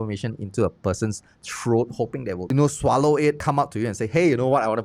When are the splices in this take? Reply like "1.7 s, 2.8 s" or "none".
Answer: 3.4 s